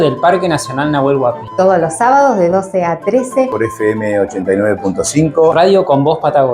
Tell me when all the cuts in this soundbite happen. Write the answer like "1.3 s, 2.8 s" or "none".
5.5 s